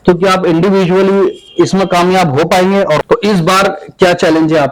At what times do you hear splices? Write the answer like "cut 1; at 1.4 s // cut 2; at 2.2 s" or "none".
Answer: cut 1; at 3.0 s